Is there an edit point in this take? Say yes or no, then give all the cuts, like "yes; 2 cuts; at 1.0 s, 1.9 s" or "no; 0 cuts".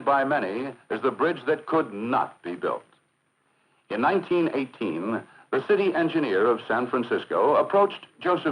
no; 0 cuts